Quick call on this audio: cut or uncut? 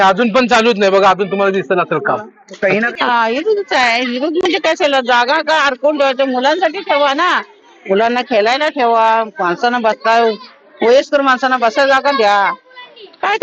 cut